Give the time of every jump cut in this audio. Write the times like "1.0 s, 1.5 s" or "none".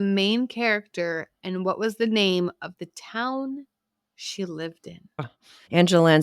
5.2 s